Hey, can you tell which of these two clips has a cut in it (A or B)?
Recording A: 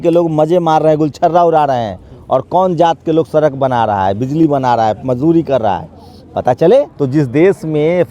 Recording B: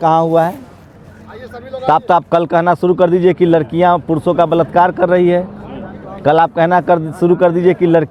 A